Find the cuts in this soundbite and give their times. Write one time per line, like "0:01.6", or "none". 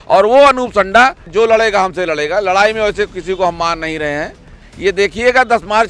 0:01.3
0:04.6